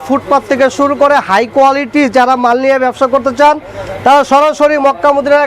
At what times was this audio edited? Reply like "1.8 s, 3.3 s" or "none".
none

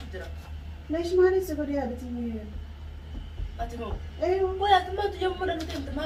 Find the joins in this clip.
none

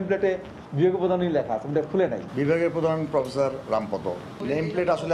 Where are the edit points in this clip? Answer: 2.3 s

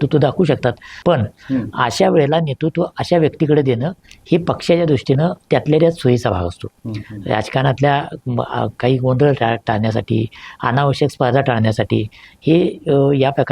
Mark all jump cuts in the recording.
0.9 s

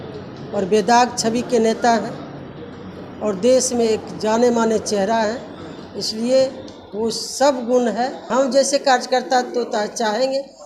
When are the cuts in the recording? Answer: 8.3 s

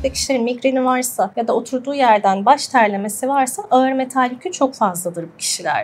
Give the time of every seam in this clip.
1.3 s

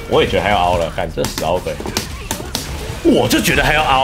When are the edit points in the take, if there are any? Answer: 2.1 s

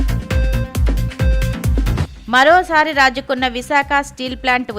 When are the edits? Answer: 2.0 s

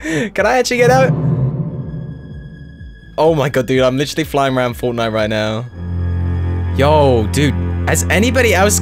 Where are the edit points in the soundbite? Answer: 1.1 s, 6.6 s

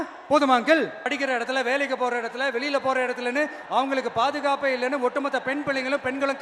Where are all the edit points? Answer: 1.1 s

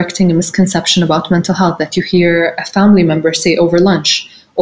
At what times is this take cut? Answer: none

